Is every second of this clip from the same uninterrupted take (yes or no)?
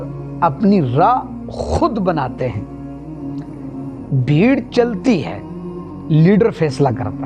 yes